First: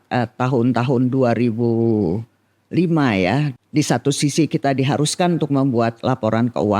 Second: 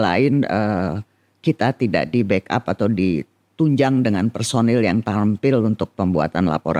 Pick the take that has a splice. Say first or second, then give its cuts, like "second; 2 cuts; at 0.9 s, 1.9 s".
first; 1 cut; at 3.5 s